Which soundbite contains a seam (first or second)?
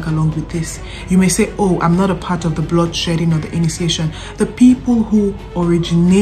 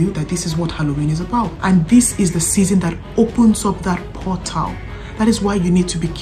second